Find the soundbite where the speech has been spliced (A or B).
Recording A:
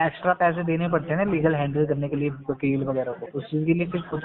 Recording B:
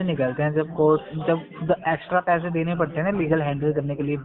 A